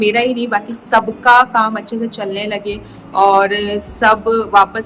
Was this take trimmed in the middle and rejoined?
no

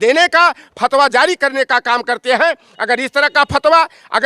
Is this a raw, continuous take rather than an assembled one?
yes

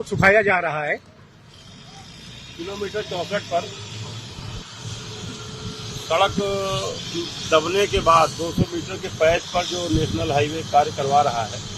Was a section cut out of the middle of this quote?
no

